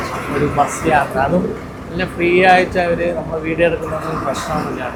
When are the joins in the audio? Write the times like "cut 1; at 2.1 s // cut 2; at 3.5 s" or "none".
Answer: none